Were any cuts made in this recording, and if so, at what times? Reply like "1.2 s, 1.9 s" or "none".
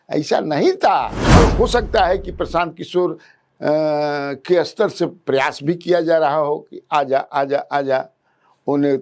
1.4 s